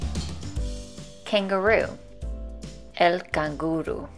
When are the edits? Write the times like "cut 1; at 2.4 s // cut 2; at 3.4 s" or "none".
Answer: cut 1; at 1.1 s